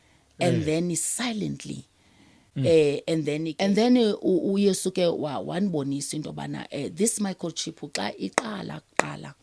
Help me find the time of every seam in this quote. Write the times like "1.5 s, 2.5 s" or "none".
3.5 s